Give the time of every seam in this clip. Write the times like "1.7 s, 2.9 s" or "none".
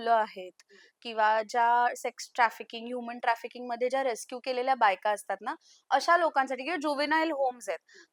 none